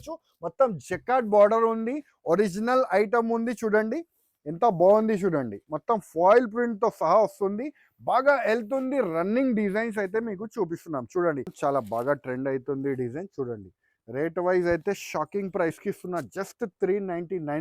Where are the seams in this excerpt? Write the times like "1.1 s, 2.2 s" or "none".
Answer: 11.5 s